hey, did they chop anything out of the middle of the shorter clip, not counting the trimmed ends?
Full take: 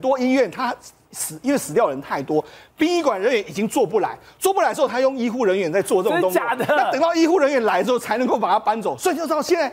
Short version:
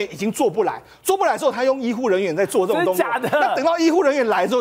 no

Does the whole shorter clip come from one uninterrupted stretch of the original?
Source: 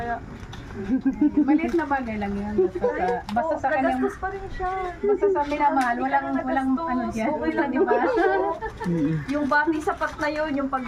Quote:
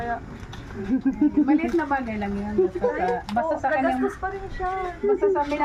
yes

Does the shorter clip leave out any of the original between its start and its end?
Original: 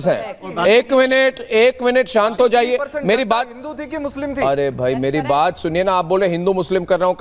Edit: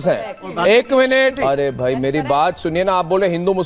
yes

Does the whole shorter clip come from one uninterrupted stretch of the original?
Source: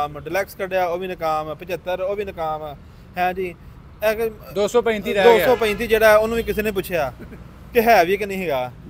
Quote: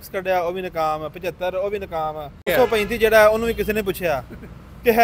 no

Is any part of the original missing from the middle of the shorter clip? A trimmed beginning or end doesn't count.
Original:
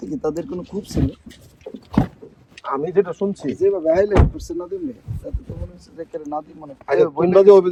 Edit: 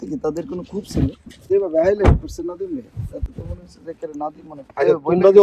yes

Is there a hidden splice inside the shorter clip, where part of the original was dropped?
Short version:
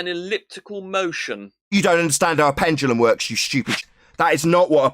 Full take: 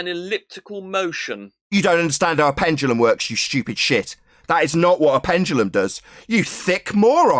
yes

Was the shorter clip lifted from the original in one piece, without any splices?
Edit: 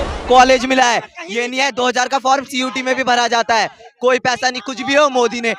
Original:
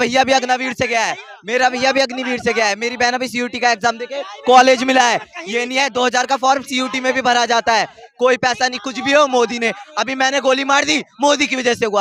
yes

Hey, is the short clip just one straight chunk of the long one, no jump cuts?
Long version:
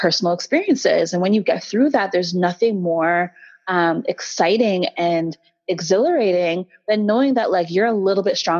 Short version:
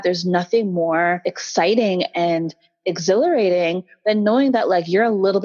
no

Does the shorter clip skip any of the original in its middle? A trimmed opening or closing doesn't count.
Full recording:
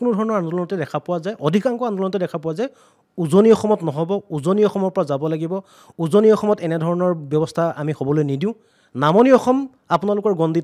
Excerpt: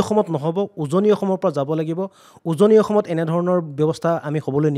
no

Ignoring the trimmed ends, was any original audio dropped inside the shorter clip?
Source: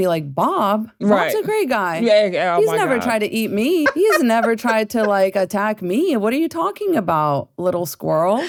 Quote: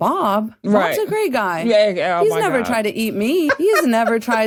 no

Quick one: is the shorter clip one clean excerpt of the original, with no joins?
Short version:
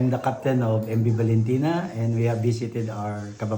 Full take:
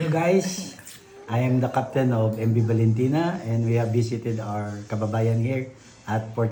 yes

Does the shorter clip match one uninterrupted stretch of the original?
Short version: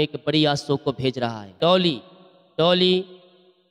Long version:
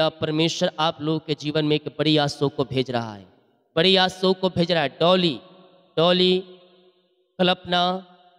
no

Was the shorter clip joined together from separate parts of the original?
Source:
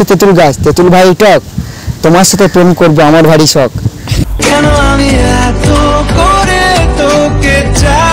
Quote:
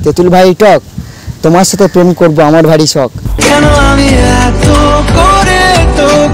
yes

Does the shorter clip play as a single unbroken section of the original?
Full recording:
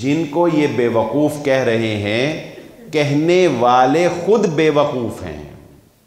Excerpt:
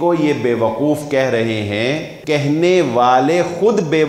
no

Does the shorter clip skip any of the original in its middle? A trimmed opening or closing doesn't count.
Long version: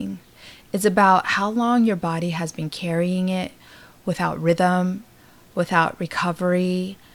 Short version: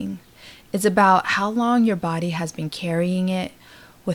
no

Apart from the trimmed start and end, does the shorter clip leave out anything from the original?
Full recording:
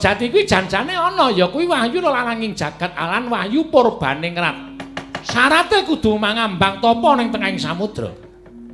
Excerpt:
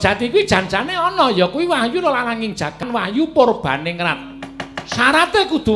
yes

